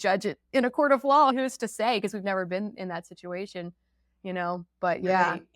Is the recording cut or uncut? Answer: cut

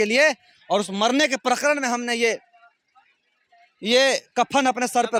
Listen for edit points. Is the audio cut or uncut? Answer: uncut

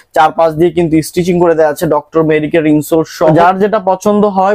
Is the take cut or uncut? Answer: cut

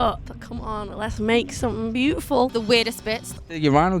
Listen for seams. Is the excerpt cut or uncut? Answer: cut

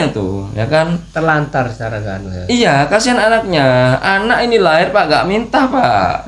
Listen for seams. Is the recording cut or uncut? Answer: uncut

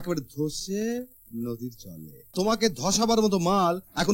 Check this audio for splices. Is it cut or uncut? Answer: cut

